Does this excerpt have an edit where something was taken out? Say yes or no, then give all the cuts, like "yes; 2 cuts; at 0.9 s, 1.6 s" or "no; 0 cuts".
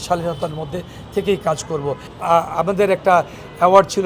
yes; 1 cut; at 2.1 s